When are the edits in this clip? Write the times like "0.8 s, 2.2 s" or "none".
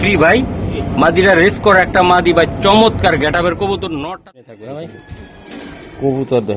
4.0 s

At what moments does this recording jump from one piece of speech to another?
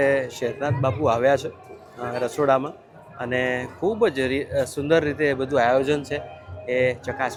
none

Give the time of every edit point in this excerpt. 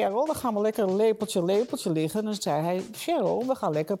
none

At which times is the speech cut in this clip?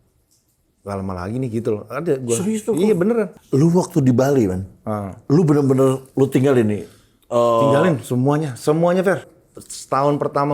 3.3 s, 9.3 s

